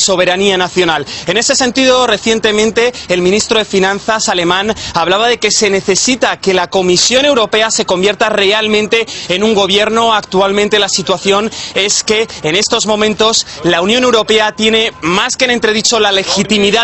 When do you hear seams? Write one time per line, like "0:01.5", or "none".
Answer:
none

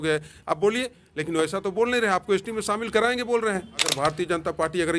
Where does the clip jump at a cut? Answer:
0:04.0

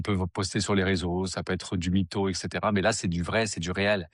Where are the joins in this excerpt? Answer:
none

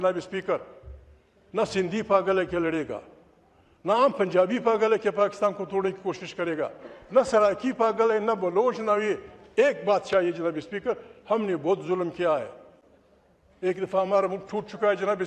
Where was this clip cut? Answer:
none

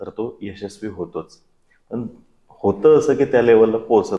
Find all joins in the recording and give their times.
none

